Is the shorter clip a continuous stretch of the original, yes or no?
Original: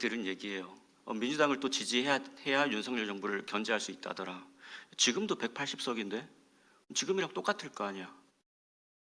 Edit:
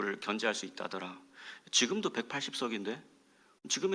yes